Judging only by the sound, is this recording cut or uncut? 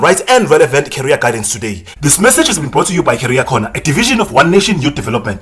uncut